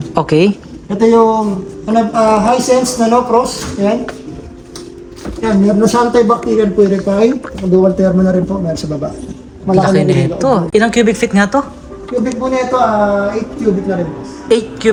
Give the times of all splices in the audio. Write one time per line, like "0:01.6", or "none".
none